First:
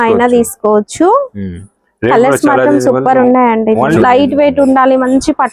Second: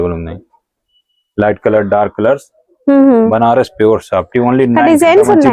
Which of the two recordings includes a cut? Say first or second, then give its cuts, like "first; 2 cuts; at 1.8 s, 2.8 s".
first; 1 cut; at 4.0 s